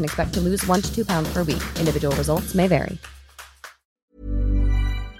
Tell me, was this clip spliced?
yes; 1 cut; at 4.1 s

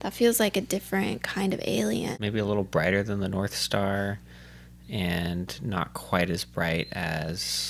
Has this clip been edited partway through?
yes; 1 cut; at 2.1 s

